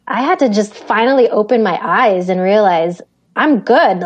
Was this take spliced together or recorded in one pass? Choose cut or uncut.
uncut